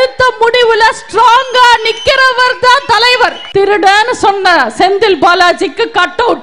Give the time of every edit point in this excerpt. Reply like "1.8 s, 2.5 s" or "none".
3.4 s